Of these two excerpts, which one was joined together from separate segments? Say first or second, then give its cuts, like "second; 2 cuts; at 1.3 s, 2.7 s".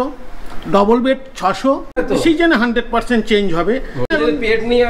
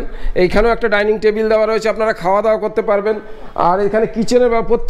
first; 2 cuts; at 2.0 s, 4.1 s